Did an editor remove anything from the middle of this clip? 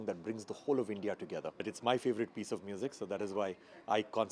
yes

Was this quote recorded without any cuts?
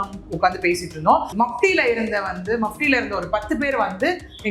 no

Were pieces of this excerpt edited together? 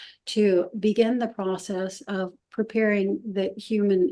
no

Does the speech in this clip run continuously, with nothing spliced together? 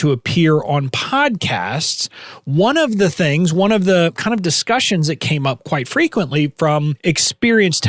no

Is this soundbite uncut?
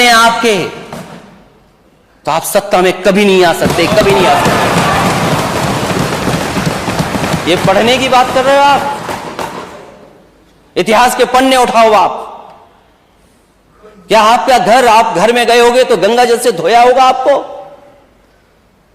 yes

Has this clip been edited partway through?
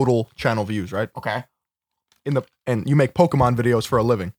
no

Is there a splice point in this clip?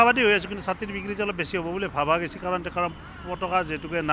no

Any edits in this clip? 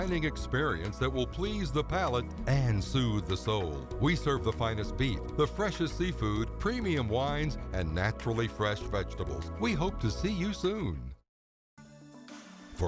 no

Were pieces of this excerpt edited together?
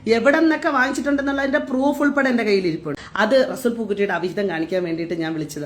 yes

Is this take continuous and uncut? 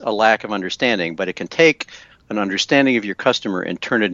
yes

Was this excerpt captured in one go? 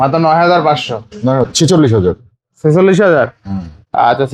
no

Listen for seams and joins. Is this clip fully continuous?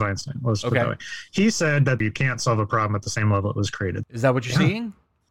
no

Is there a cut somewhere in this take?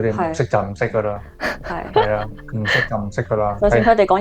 no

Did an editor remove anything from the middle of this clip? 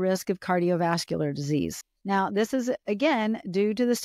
yes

